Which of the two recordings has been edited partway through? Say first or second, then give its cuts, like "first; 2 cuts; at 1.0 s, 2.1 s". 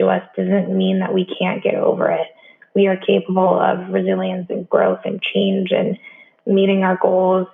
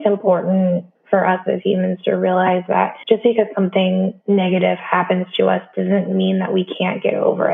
second; 3 cuts; at 1.0 s, 3.0 s, 4.2 s